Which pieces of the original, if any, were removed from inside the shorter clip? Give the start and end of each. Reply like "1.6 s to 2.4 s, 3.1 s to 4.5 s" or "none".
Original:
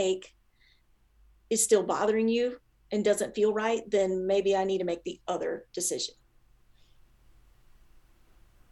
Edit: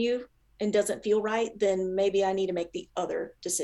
none